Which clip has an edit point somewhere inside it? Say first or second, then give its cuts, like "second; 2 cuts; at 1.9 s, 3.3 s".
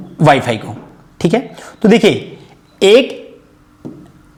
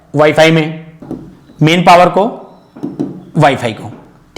second; 1 cut; at 0.9 s